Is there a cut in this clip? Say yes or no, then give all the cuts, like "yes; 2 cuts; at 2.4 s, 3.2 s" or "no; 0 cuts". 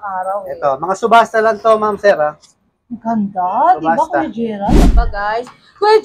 yes; 1 cut; at 4.8 s